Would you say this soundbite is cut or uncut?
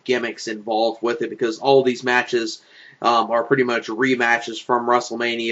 cut